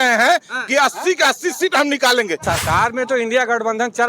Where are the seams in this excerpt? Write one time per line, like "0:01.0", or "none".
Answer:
0:02.4